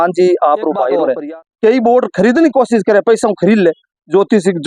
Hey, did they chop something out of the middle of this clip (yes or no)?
yes